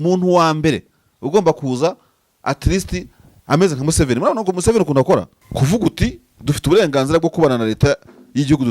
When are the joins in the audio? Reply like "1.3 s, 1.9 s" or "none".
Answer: 5.4 s